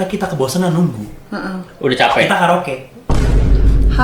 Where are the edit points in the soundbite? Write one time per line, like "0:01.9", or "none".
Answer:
none